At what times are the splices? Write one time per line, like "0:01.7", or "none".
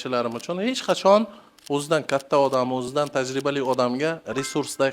0:02.9